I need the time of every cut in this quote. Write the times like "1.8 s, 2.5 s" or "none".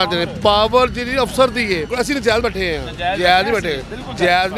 1.9 s